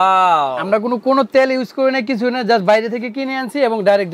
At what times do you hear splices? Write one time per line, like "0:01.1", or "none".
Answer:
none